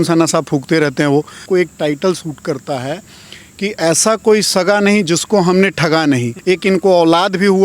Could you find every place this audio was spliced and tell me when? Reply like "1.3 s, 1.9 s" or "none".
1.4 s, 6.3 s